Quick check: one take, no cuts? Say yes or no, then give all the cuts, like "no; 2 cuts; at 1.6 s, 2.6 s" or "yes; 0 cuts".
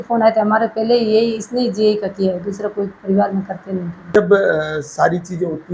yes; 0 cuts